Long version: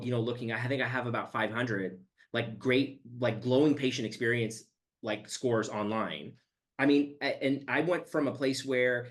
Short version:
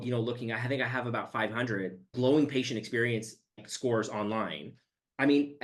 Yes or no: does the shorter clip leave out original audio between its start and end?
yes